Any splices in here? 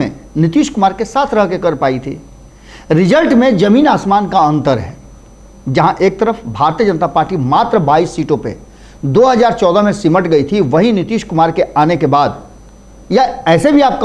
no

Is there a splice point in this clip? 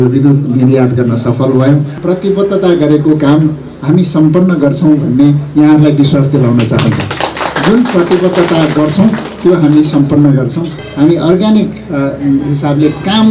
yes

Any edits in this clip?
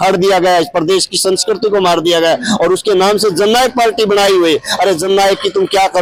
no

